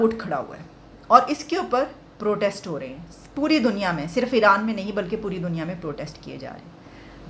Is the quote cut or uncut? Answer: uncut